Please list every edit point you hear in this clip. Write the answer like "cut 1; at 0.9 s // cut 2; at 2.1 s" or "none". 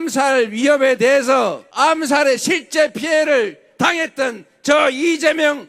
cut 1; at 1.6 s